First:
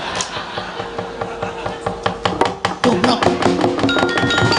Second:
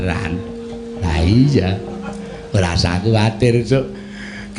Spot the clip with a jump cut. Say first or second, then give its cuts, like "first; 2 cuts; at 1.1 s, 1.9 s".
second; 1 cut; at 1.0 s